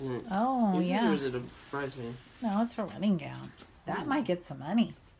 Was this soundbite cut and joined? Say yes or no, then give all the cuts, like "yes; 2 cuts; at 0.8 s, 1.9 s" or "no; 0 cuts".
no; 0 cuts